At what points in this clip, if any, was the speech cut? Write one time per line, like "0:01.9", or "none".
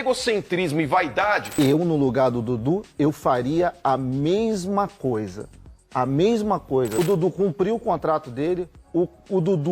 0:01.5
0:07.0